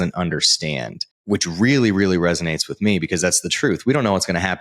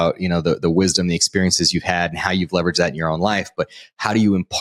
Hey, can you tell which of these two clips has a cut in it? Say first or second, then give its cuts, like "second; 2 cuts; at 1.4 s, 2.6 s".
first; 1 cut; at 1.1 s